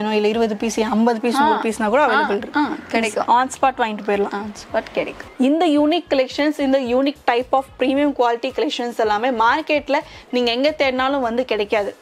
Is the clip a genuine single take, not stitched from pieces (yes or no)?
no